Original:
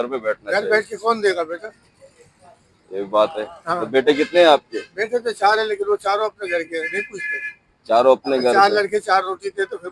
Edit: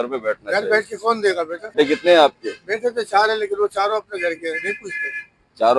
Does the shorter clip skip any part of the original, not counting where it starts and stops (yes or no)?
yes